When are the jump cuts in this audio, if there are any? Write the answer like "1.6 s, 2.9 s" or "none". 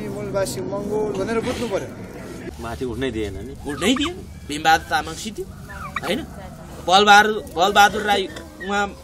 2.4 s